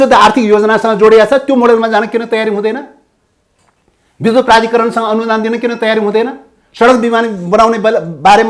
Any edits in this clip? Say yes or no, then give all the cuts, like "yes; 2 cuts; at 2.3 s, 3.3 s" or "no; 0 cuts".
no; 0 cuts